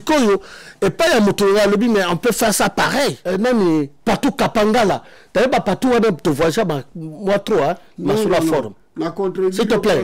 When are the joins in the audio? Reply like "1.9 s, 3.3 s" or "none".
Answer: 3.2 s